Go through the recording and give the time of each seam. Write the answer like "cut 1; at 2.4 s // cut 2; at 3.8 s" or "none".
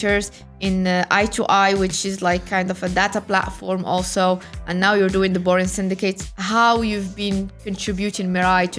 none